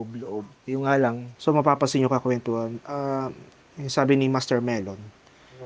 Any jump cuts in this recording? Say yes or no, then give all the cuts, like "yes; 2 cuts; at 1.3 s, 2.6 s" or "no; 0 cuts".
yes; 1 cut; at 1.3 s